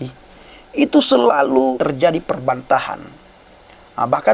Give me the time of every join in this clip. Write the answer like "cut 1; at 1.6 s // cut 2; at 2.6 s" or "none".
cut 1; at 1.7 s